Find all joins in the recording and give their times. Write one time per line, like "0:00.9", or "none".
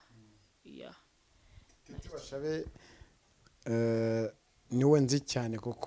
none